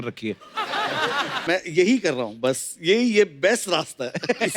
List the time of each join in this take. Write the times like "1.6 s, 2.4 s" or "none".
1.5 s

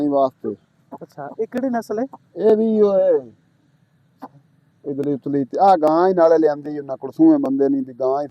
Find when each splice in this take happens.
none

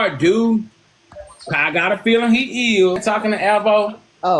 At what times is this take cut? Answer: 3.0 s

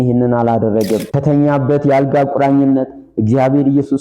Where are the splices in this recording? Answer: 1.1 s

